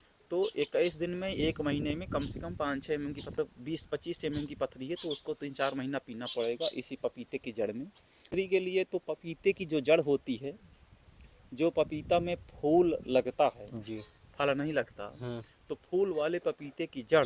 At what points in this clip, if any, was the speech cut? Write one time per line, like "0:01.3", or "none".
0:03.4
0:08.3